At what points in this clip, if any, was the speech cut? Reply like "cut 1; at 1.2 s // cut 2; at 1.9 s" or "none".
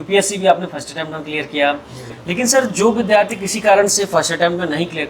none